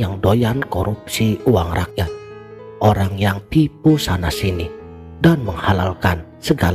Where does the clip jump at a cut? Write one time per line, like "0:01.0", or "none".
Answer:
none